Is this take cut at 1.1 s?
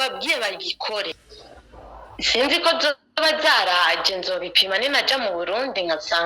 yes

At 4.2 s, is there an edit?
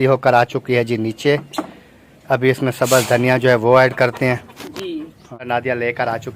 no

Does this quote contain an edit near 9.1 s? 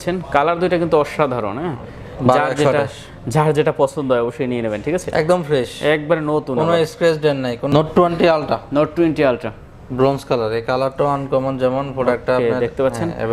no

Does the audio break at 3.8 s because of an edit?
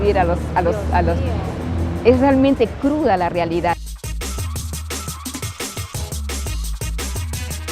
yes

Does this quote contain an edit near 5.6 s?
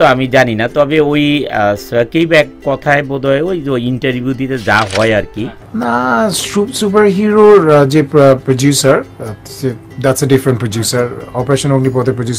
yes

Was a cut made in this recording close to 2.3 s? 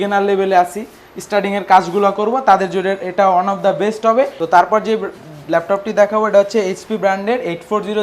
no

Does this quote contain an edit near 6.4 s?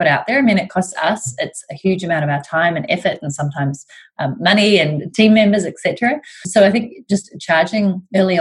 yes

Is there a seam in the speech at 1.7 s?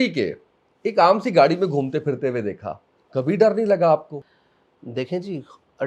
no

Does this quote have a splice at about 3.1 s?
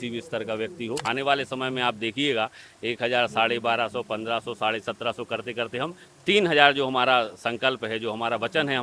no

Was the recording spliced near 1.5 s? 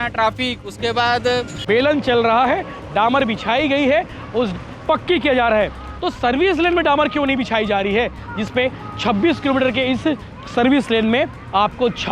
yes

